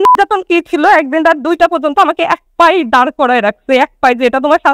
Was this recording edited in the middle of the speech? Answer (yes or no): no